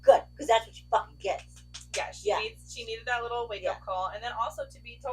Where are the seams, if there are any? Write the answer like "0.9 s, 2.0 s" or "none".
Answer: none